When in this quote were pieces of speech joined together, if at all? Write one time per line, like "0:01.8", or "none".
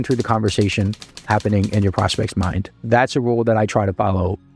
0:02.7